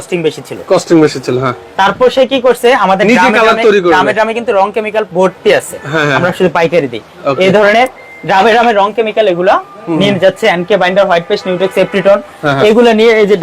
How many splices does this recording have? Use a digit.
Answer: 0